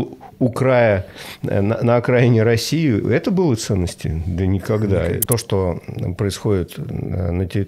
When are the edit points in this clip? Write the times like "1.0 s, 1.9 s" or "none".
5.2 s